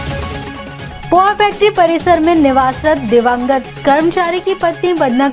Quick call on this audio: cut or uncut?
uncut